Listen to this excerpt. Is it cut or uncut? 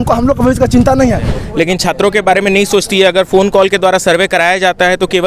cut